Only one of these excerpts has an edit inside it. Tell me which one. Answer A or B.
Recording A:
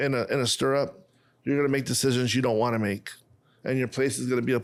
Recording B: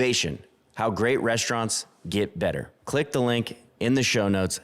B